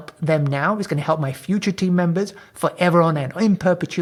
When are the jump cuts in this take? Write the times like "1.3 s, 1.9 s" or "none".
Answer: none